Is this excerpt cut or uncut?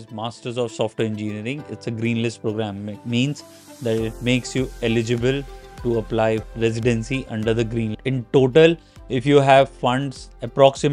cut